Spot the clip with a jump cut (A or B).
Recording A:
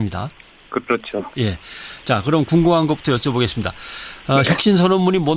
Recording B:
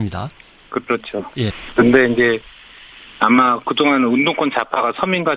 A